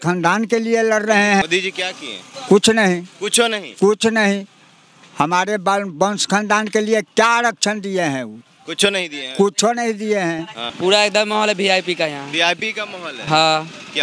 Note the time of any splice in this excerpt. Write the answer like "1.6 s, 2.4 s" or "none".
1.4 s, 10.4 s